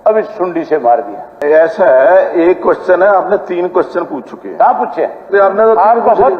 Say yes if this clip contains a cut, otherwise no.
yes